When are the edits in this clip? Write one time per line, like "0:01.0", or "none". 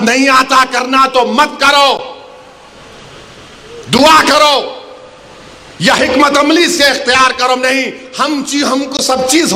none